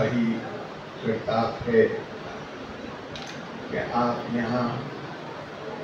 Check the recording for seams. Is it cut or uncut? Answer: uncut